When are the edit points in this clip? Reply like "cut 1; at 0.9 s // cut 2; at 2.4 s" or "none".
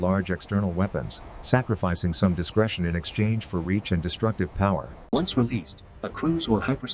none